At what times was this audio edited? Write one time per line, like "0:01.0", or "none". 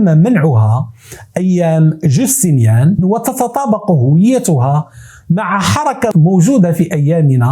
0:03.0
0:06.1